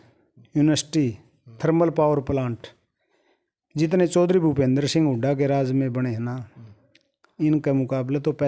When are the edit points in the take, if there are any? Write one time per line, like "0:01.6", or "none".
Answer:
none